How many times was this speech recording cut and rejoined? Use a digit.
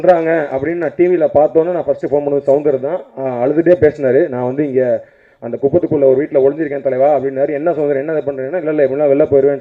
0